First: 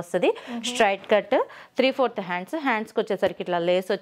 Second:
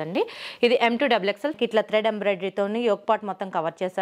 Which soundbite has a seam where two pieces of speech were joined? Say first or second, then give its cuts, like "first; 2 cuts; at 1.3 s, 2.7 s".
second; 1 cut; at 1.5 s